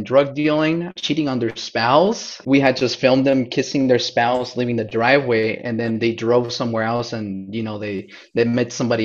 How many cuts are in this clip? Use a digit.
2